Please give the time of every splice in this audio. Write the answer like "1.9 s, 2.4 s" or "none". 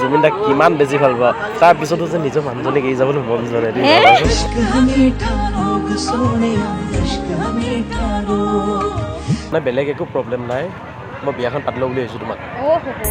9.5 s

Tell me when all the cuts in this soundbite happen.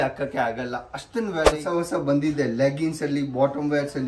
1.5 s

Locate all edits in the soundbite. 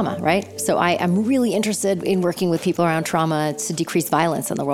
2.0 s

